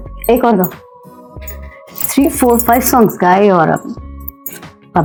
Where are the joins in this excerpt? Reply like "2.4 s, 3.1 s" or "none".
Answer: none